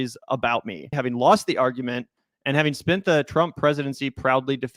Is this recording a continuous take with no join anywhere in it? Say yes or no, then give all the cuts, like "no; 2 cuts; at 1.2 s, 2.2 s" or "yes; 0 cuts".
no; 1 cut; at 0.9 s